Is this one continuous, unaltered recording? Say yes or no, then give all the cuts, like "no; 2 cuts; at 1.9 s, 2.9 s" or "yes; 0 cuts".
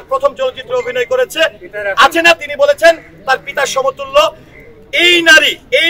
yes; 0 cuts